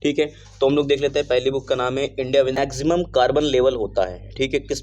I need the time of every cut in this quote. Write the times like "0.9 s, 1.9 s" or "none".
2.6 s